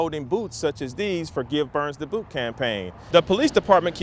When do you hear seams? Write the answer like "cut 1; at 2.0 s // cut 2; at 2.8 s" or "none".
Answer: cut 1; at 2.9 s

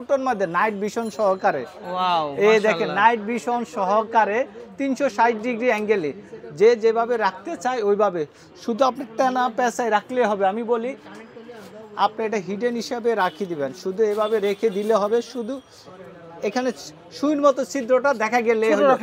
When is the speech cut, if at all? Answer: none

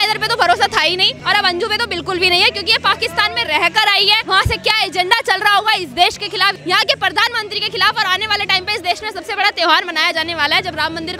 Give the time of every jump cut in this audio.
cut 1; at 1.1 s // cut 2; at 4.2 s // cut 3; at 6.6 s

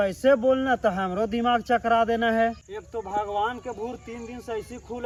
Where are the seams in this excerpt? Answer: none

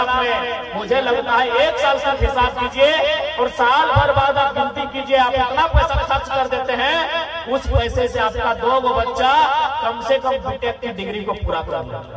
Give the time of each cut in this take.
none

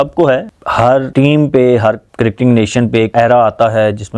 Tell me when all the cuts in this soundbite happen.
cut 1; at 0.8 s // cut 2; at 2.1 s // cut 3; at 3.1 s

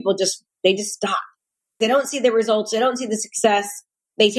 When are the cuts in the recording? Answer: cut 1; at 1.8 s

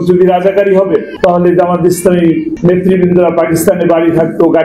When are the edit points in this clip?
cut 1; at 1.1 s // cut 2; at 2.5 s

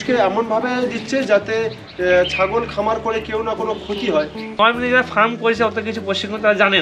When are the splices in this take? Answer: cut 1; at 4.4 s

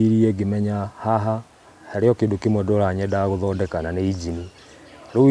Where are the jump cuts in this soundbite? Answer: none

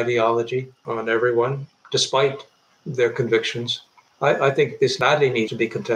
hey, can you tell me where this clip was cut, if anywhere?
cut 1; at 4.9 s

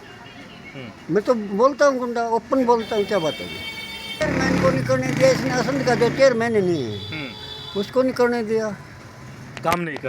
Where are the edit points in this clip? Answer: cut 1; at 4.2 s

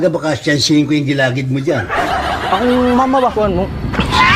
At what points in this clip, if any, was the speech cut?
cut 1; at 3.3 s

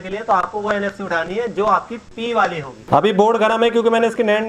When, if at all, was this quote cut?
cut 1; at 2.7 s

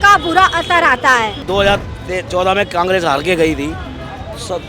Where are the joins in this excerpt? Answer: cut 1; at 1.4 s

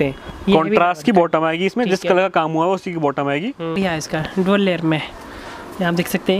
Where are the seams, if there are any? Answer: cut 1; at 3.8 s

